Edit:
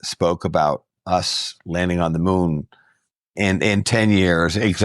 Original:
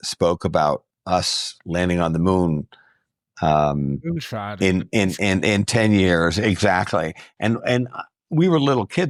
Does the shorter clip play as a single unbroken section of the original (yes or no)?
no